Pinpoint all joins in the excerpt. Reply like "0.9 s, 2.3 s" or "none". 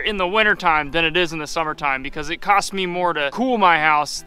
3.3 s